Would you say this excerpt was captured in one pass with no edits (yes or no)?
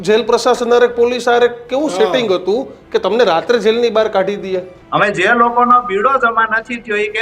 no